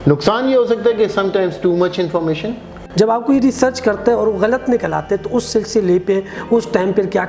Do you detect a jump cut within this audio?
yes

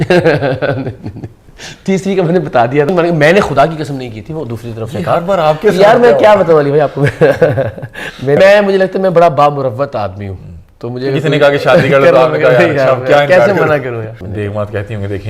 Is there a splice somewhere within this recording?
yes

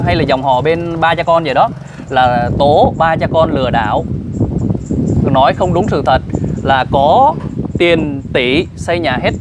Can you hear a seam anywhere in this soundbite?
no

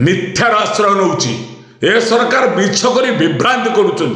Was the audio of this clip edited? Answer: no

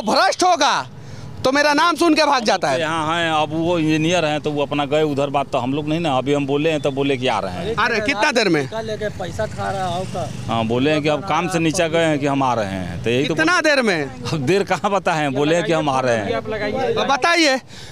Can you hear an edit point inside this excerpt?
no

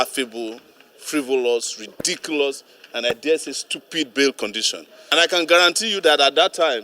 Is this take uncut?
no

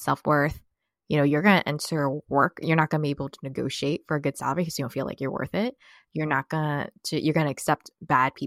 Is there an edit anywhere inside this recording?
no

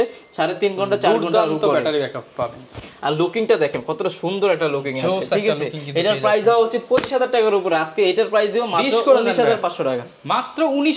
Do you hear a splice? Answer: no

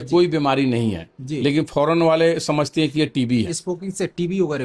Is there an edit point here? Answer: yes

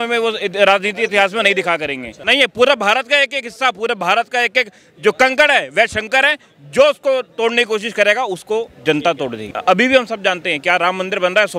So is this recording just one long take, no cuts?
no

